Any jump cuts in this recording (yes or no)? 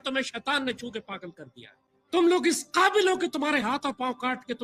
no